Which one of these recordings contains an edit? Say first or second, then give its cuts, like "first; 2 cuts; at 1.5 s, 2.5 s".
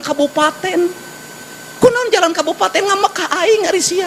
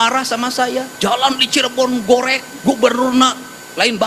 second; 2 cuts; at 0.9 s, 2.4 s